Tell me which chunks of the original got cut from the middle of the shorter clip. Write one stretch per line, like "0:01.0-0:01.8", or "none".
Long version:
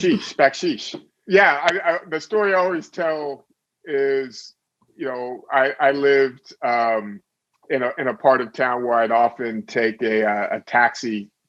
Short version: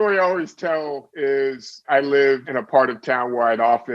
0:03.4-0:03.8
0:04.5-0:05.7
0:06.4-0:08.0